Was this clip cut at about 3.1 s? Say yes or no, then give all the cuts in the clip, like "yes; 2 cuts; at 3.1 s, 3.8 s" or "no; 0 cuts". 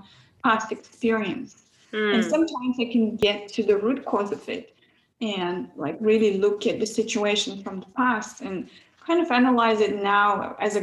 yes; 1 cut; at 3.1 s